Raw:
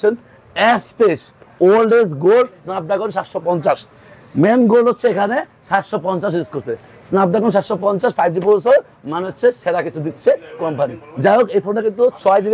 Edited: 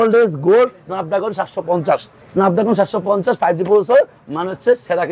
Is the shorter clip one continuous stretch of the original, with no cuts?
no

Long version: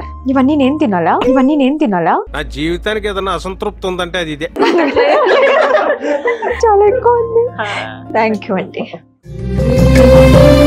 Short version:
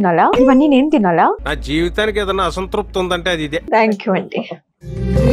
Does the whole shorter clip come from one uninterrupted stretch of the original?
no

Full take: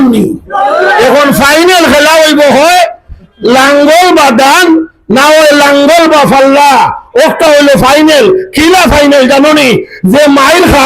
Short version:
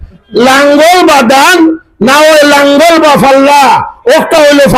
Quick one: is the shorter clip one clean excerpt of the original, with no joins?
yes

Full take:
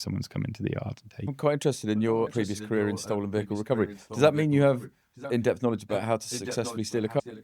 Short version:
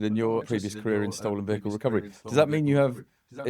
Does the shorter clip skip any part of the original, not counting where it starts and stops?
no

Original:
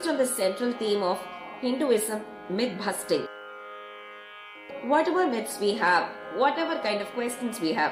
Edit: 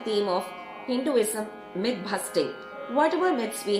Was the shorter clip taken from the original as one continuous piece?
no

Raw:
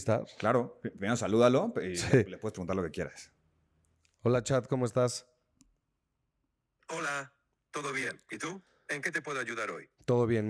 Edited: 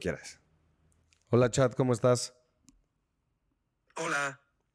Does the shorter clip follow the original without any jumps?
yes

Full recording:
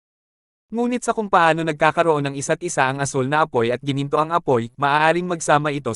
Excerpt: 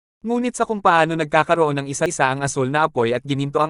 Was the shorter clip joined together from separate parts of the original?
yes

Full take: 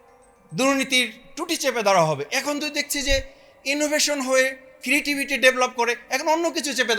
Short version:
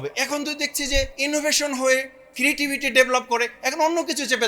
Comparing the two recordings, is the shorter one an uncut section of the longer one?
no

